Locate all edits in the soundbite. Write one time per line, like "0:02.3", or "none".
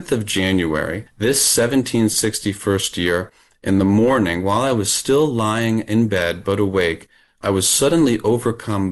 0:01.0